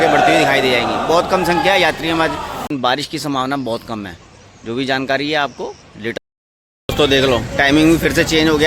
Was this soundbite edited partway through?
yes; 2 cuts; at 2.7 s, 6.1 s

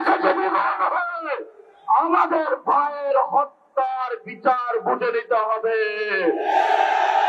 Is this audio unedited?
yes; 0 cuts

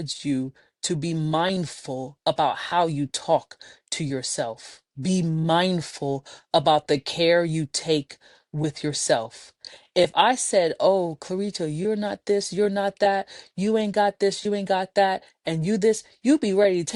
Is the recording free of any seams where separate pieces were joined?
yes; 0 cuts

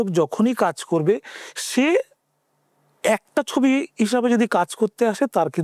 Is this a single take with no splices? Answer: yes; 0 cuts

